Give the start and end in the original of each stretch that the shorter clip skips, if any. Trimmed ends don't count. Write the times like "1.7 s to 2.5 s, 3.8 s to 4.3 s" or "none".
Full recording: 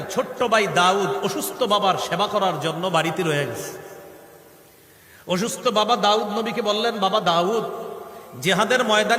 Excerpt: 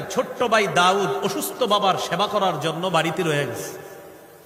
none